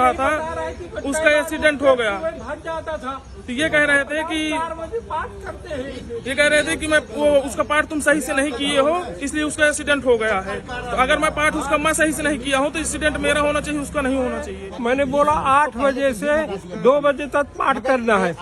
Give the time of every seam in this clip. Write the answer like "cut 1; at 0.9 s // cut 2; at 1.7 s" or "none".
cut 1; at 14.6 s